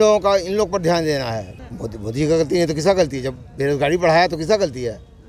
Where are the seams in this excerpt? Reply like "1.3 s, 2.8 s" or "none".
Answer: 1.5 s